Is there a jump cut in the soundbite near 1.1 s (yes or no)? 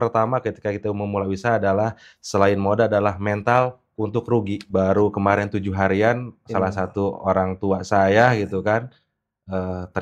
no